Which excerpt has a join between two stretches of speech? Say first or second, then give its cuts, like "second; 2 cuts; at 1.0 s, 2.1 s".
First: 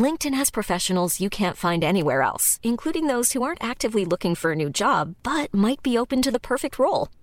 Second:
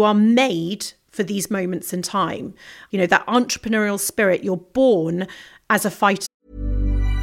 second; 1 cut; at 6.2 s